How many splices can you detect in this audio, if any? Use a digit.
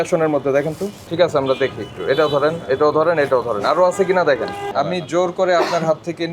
2